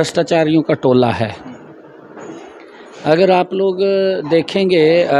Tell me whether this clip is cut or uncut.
uncut